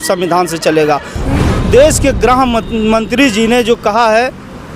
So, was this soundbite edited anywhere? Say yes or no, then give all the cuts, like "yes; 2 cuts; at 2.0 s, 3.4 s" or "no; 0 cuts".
yes; 1 cut; at 1.2 s